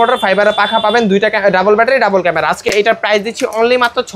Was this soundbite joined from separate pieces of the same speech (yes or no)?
no